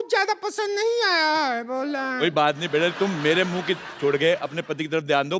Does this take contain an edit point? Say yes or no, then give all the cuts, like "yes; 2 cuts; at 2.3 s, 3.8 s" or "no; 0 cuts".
yes; 1 cut; at 2.9 s